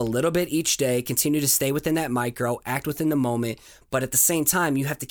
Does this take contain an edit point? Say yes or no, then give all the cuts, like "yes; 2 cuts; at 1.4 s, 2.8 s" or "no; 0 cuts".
no; 0 cuts